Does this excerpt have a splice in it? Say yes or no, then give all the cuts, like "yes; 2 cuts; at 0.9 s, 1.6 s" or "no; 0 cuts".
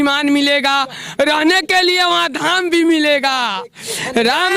no; 0 cuts